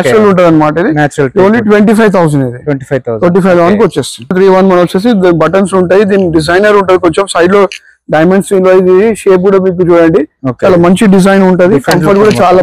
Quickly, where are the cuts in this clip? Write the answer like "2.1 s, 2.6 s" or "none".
4.3 s